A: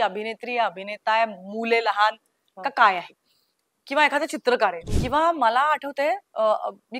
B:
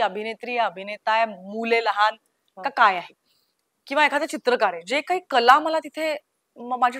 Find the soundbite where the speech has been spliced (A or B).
A